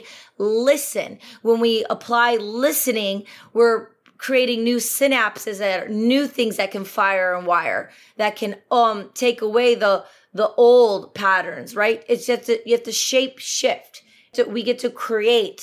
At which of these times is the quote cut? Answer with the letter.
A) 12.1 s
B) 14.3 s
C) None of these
B